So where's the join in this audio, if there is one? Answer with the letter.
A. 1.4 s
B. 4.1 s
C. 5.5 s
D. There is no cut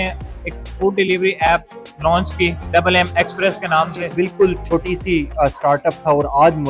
B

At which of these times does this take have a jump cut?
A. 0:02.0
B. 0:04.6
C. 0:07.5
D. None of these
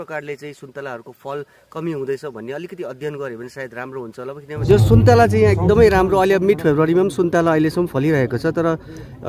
B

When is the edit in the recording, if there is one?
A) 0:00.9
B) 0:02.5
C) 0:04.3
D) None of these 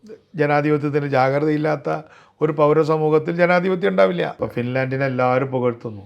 C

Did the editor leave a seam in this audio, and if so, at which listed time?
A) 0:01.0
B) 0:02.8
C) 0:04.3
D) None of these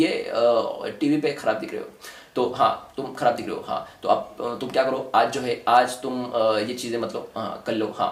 D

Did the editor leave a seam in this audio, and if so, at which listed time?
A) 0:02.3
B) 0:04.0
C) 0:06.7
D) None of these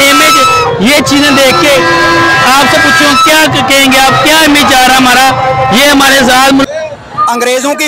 C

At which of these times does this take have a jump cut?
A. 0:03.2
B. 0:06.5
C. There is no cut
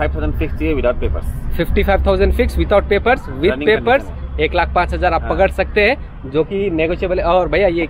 C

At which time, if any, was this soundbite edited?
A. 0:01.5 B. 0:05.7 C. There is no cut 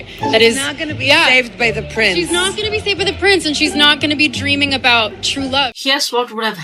B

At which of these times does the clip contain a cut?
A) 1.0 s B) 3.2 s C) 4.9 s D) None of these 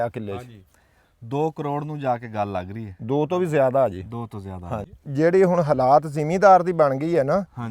C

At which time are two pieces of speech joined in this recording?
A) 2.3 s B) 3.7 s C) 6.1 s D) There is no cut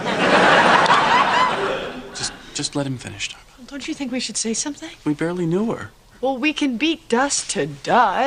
B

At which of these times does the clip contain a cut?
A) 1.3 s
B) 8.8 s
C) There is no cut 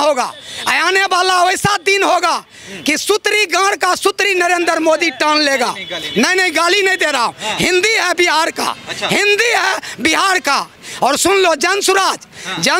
C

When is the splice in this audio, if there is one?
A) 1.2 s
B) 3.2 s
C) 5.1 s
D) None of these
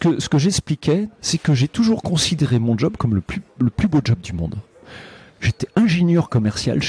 A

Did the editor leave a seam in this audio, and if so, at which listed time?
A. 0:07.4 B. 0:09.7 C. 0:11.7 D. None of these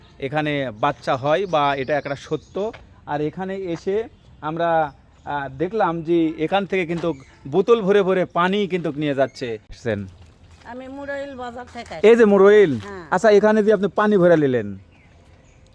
B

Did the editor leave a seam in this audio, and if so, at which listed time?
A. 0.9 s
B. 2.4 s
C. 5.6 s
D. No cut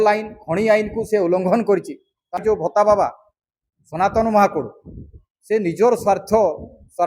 B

